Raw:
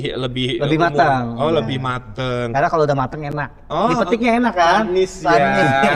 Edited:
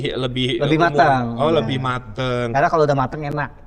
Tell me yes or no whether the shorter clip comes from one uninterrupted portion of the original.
yes